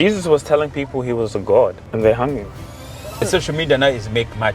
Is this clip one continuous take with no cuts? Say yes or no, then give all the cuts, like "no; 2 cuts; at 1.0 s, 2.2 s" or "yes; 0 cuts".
no; 2 cuts; at 1.8 s, 3.3 s